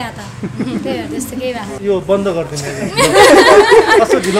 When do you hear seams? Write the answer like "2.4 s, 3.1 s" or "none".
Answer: 1.7 s